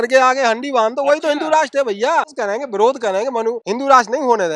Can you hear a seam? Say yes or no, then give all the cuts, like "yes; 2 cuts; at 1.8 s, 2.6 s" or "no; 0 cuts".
yes; 2 cuts; at 2.3 s, 3.6 s